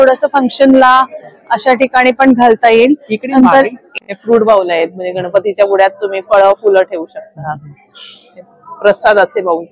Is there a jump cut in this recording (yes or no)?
yes